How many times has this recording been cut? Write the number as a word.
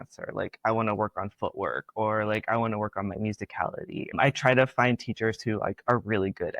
one